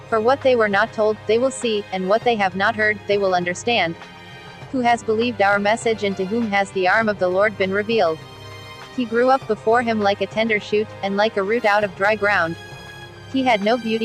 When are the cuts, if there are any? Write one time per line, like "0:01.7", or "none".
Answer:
0:04.5
0:08.7